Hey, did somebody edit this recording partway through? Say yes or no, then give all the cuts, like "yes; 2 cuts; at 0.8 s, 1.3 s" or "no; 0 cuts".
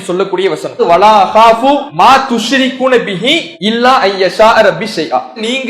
yes; 3 cuts; at 0.8 s, 1.9 s, 3.5 s